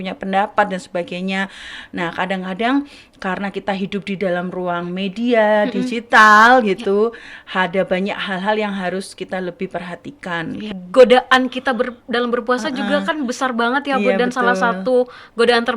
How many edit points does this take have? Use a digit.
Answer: 1